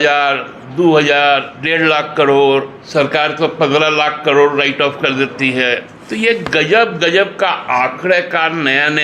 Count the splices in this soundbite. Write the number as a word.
three